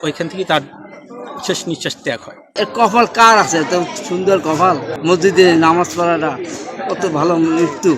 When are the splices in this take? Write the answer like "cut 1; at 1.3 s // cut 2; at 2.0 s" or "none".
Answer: cut 1; at 2.4 s // cut 2; at 4.9 s